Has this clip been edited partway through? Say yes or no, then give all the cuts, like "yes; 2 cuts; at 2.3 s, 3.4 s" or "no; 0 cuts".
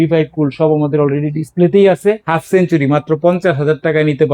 yes; 1 cut; at 2.2 s